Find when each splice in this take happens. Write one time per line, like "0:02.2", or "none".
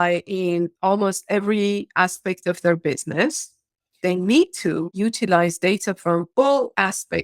0:04.0